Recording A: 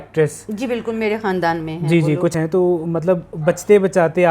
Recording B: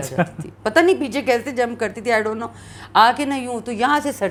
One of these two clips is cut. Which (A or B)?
A